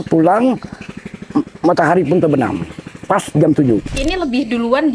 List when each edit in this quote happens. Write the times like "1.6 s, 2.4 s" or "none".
4.0 s